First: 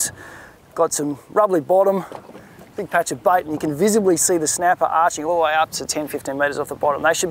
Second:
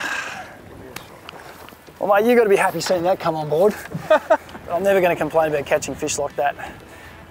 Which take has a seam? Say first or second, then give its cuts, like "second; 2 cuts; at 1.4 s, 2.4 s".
second; 1 cut; at 4.6 s